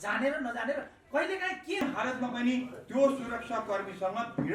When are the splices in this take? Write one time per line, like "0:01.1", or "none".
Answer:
0:01.8